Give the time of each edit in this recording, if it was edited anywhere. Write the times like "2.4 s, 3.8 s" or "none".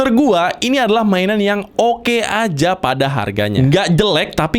none